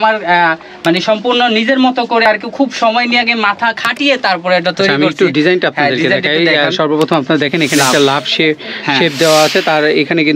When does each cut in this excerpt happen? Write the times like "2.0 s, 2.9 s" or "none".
none